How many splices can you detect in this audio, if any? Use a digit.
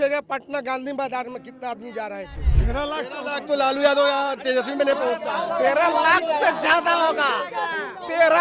1